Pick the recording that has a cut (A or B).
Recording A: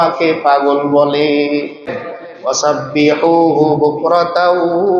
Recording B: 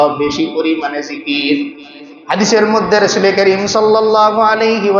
A